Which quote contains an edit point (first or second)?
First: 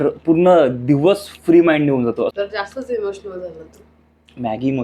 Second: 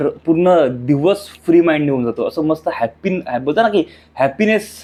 first